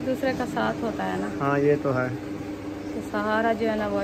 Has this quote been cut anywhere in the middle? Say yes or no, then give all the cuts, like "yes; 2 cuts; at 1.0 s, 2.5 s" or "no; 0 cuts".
no; 0 cuts